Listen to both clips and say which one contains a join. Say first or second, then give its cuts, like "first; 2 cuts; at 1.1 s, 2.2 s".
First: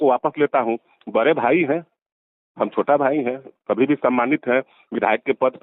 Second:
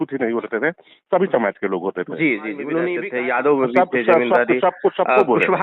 second; 1 cut; at 3.1 s